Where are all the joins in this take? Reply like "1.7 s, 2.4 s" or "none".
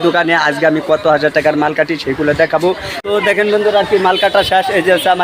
2.9 s

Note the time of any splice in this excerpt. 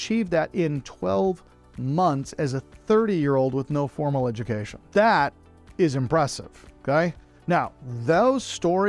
4.7 s

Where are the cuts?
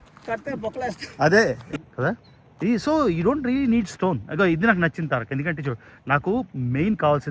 1.7 s

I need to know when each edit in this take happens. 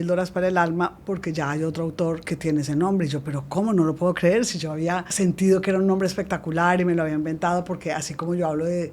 2.2 s, 5.1 s

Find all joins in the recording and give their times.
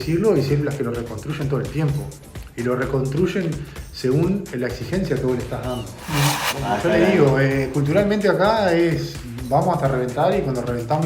6.5 s

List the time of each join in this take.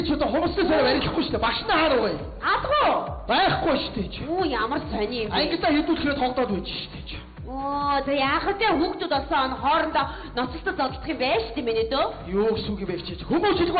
1.8 s

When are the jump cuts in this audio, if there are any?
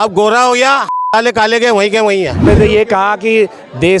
2.5 s

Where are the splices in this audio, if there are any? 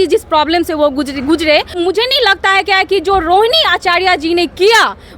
1.7 s

